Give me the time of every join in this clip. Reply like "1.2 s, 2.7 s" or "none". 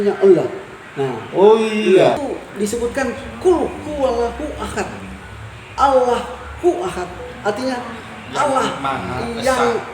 2.2 s